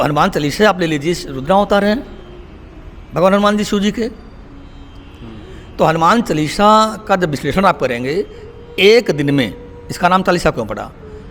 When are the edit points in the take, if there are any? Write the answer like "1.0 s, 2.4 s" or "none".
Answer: none